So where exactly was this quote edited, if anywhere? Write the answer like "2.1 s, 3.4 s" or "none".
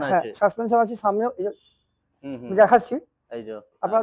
none